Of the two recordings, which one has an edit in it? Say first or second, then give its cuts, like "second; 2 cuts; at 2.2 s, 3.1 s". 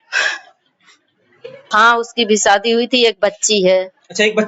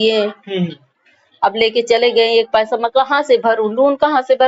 first; 1 cut; at 1.6 s